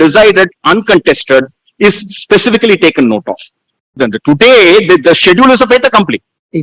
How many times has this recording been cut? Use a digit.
1